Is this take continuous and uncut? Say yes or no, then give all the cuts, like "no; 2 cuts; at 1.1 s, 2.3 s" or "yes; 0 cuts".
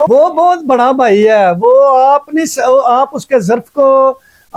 yes; 0 cuts